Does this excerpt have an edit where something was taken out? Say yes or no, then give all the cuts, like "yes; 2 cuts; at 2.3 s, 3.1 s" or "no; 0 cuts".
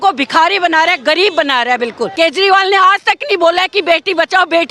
yes; 1 cut; at 2.1 s